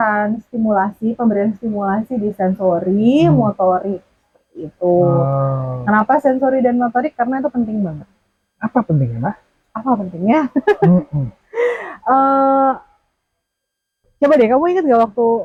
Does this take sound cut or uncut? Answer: uncut